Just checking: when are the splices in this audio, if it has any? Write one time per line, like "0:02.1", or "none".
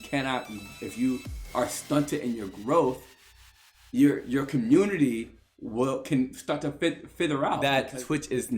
0:07.6